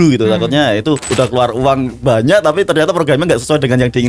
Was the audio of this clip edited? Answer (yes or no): yes